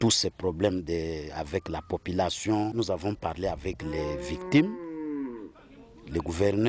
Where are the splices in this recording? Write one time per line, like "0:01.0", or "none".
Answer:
0:02.7
0:03.8